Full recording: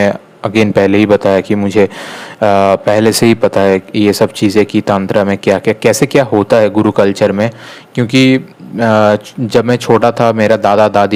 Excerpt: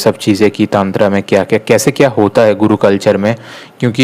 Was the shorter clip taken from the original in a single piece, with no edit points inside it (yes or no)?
yes